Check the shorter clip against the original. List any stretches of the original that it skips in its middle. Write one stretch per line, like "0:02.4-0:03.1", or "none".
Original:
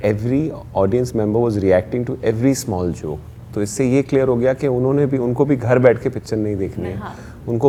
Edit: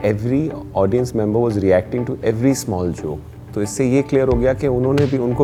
none